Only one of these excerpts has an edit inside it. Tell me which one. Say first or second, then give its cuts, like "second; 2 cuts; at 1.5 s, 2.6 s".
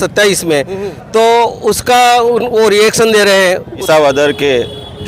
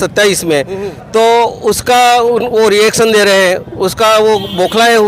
first; 1 cut; at 3.8 s